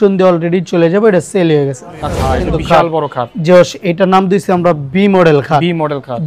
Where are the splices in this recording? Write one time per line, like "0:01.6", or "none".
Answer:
0:02.2